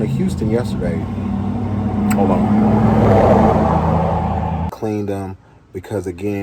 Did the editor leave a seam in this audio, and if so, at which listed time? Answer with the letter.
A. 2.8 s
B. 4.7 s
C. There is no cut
B